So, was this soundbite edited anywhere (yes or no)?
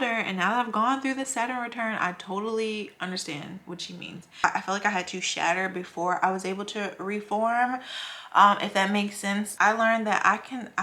yes